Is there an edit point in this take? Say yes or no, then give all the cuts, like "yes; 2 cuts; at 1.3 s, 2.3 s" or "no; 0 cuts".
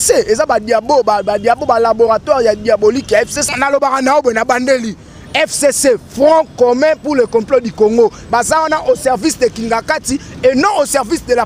yes; 1 cut; at 3.5 s